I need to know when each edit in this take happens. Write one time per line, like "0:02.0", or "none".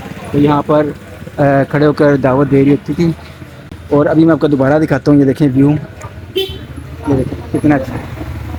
none